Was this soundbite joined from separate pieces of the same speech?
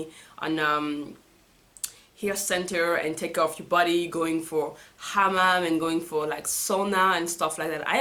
no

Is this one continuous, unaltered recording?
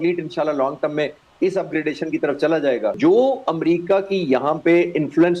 no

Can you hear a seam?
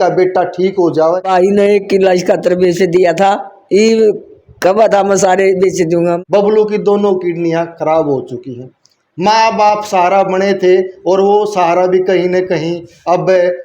yes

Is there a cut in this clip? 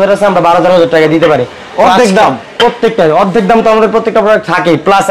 no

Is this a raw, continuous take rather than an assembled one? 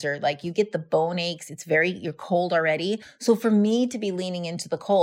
no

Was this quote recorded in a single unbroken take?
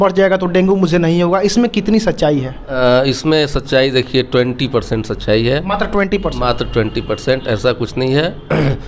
yes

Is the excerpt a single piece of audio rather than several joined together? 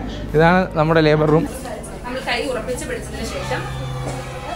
no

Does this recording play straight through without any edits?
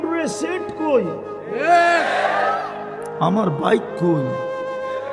no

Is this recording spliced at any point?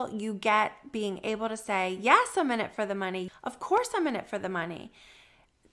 yes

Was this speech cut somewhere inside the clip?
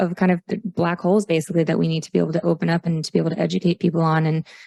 no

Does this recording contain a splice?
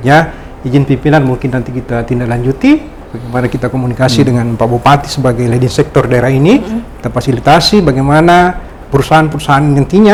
no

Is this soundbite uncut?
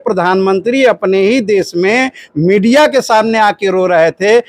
yes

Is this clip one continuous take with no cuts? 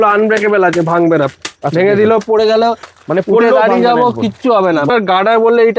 no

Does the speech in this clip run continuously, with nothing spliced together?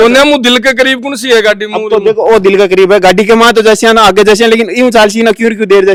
yes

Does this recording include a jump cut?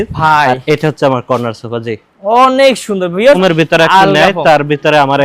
yes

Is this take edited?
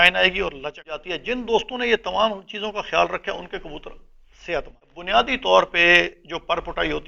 yes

